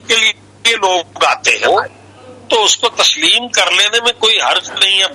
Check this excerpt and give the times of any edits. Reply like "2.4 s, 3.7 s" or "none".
1.6 s